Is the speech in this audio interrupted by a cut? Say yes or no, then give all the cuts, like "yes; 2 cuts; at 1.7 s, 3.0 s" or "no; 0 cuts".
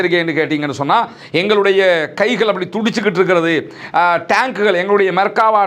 no; 0 cuts